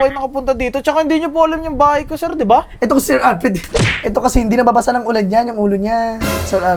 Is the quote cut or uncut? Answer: uncut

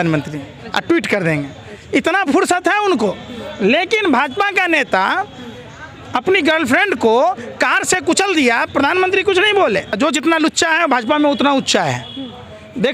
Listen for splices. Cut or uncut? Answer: cut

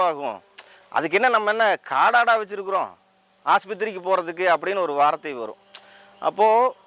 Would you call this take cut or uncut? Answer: uncut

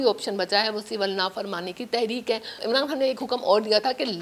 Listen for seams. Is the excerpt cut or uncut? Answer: cut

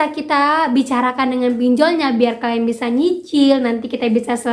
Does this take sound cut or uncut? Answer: uncut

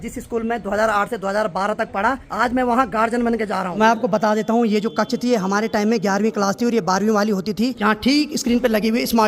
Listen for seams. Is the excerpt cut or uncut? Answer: cut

